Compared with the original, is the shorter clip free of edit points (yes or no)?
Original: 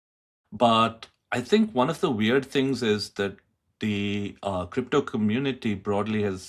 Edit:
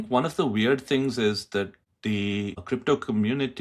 no